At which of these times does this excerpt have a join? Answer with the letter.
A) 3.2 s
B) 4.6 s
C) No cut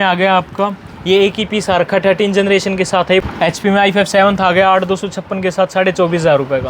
A